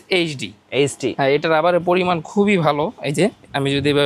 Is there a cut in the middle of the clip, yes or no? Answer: yes